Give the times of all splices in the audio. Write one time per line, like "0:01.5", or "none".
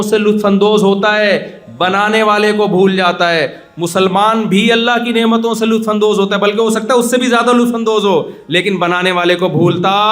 none